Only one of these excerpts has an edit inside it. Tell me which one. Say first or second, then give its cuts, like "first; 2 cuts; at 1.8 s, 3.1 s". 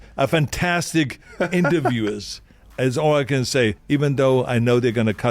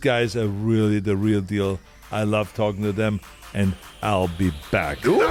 first; 1 cut; at 1.2 s